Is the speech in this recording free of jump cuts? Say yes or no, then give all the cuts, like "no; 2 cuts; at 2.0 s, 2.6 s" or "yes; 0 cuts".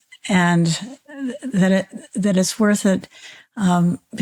yes; 0 cuts